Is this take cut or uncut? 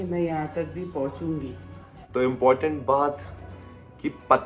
cut